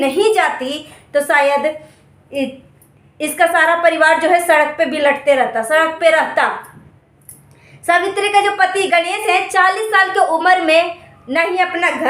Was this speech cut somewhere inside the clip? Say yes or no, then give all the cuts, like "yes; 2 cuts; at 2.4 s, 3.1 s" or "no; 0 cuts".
no; 0 cuts